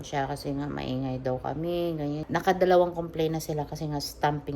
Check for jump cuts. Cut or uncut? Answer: cut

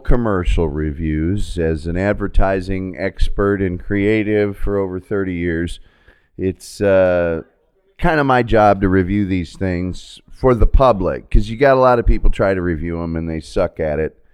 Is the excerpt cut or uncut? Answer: uncut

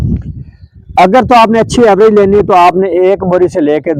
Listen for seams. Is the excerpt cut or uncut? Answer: uncut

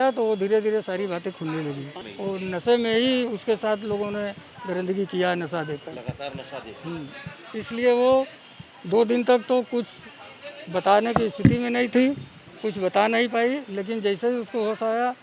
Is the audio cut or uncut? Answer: cut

